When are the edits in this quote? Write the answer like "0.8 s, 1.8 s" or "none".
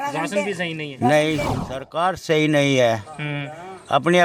1.6 s